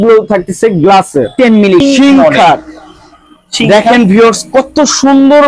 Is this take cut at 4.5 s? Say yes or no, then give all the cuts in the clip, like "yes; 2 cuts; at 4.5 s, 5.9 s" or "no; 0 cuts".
no; 1 cut; at 1.8 s